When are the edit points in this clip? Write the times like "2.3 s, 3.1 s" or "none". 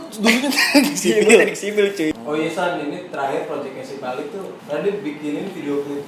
2.1 s